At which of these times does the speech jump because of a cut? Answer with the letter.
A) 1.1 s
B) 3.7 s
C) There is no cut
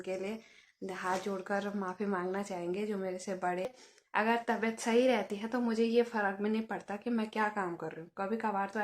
B